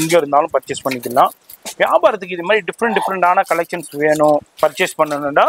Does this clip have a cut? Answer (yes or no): no